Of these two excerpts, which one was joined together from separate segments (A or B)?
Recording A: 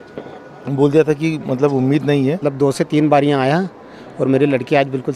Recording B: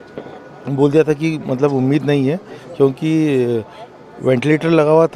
A